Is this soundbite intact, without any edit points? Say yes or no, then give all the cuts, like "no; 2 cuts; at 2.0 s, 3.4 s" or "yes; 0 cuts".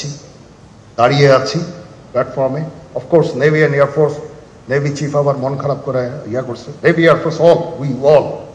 yes; 0 cuts